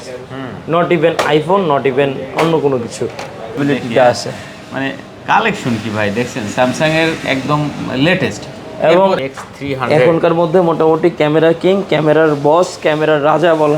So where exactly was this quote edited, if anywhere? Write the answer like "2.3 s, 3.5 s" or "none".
3.6 s, 9.2 s